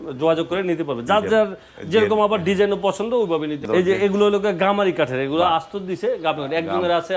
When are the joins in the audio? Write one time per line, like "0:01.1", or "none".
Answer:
0:03.6